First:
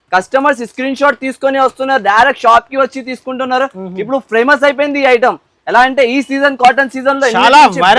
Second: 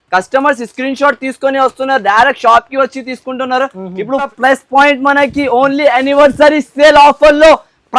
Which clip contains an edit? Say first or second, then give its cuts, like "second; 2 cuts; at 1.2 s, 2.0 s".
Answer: second; 1 cut; at 4.3 s